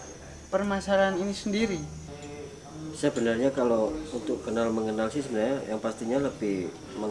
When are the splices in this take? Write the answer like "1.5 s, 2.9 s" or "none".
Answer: 2.0 s